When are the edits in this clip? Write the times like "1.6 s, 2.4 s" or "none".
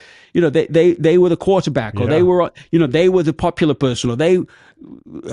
none